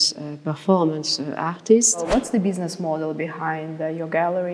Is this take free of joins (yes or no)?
no